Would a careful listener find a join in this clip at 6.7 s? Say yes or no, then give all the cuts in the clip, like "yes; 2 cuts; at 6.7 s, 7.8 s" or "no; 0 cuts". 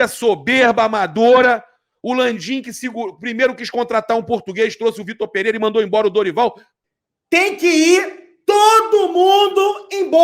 yes; 1 cut; at 6.7 s